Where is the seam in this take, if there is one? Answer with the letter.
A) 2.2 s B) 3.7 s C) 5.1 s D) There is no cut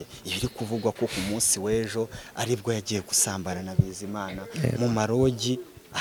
D